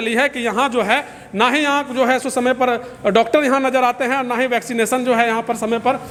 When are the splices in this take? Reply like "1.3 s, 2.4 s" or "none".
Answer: none

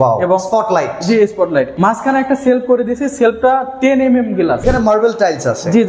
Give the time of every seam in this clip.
1.7 s, 4.6 s

